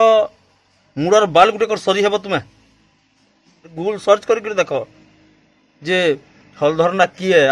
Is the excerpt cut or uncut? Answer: cut